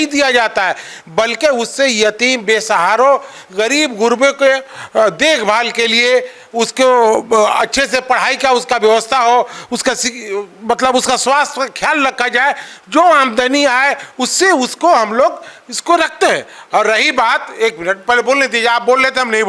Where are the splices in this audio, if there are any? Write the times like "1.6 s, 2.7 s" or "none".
none

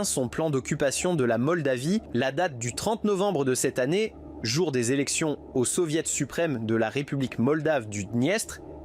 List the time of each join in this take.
2.1 s

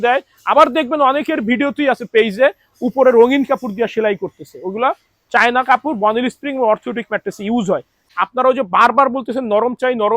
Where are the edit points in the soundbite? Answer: 8.0 s

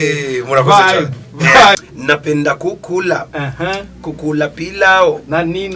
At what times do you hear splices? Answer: 1.7 s

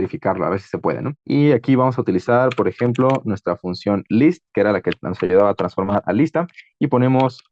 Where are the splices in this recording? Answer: 1.1 s

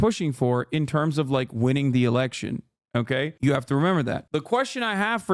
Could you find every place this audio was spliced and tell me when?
4.2 s

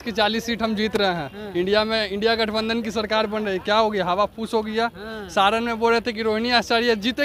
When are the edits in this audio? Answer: none

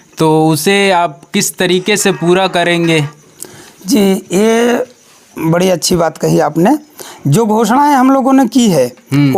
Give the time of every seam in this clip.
none

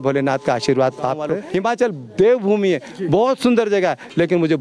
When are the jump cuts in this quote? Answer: 1.3 s

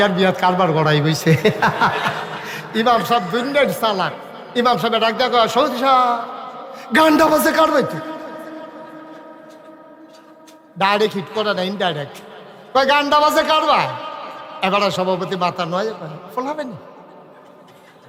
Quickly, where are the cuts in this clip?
none

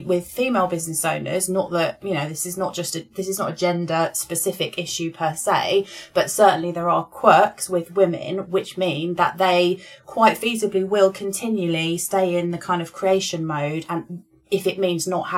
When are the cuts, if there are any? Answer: none

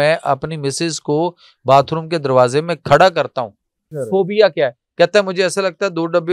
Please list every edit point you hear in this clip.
3.9 s

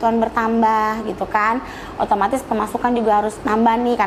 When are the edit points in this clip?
none

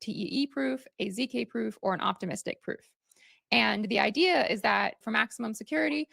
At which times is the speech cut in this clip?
5.0 s

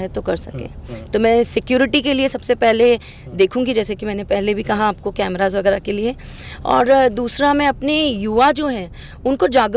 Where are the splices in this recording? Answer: none

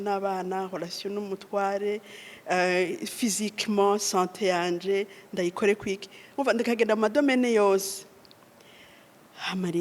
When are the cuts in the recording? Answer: none

